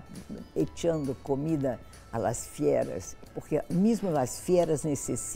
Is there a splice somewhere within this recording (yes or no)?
no